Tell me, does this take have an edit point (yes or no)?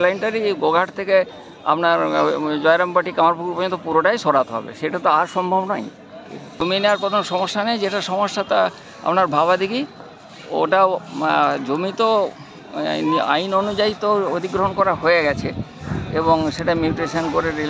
yes